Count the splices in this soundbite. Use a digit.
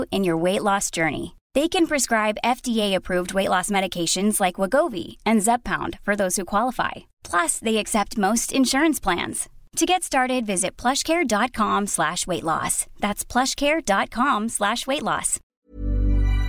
1